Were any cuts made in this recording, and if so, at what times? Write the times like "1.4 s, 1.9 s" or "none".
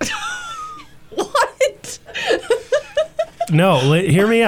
none

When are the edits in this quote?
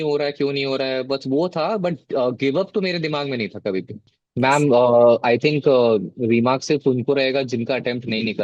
4.1 s

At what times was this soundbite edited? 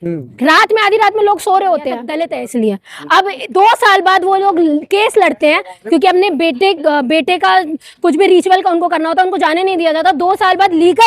2.1 s

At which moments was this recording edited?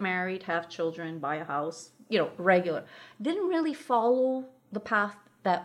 none

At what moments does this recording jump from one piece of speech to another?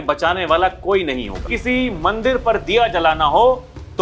1.5 s

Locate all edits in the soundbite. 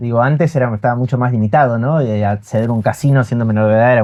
none

